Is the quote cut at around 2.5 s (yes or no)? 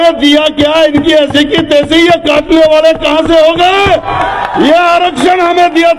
no